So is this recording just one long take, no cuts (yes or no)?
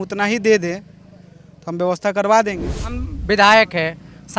no